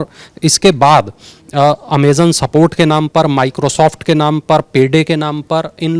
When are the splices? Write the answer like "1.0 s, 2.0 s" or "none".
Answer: none